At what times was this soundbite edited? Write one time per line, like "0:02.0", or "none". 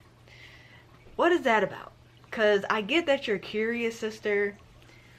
none